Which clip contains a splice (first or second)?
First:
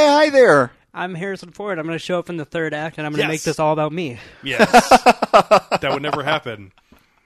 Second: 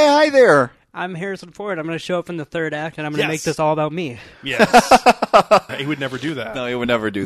second